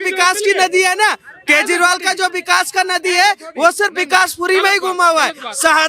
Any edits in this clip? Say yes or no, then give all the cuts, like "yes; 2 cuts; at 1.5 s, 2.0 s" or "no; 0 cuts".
no; 0 cuts